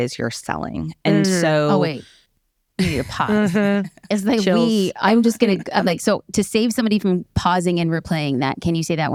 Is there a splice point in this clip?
no; 0 cuts

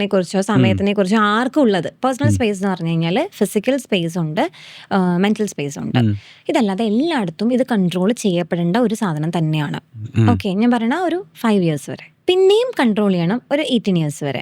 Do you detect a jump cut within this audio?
yes; 2 cuts; at 1.9 s, 12.2 s

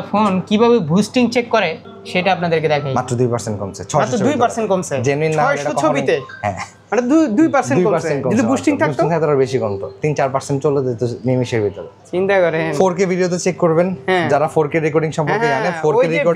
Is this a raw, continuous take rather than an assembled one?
yes; 0 cuts

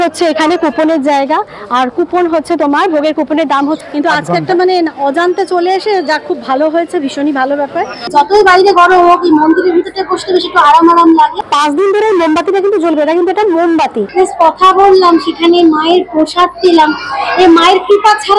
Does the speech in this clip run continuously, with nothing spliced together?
no; 4 cuts; at 3.8 s, 8.1 s, 11.4 s, 14.0 s

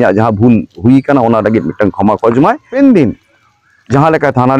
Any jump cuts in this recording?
yes; 1 cut; at 2.7 s

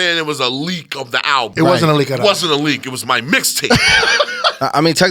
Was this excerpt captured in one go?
no; 1 cut; at 1.5 s

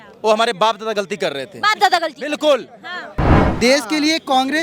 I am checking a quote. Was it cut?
yes; 1 cut; at 3.4 s

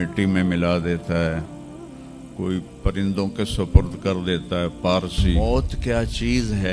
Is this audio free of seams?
no; 1 cut; at 5.4 s

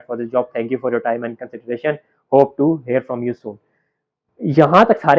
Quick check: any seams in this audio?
no; 0 cuts

